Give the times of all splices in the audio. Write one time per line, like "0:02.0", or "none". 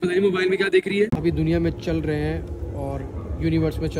0:01.1